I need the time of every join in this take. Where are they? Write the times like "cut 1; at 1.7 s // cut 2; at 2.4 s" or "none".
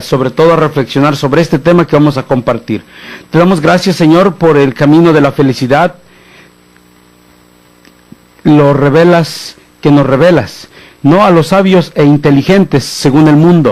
cut 1; at 10.3 s